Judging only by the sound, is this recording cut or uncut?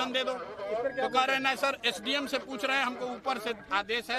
uncut